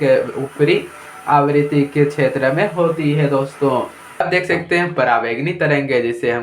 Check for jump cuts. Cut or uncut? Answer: cut